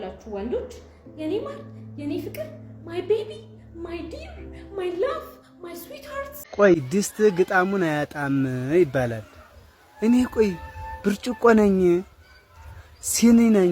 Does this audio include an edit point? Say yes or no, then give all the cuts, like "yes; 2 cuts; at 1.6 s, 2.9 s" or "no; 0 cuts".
yes; 1 cut; at 6.4 s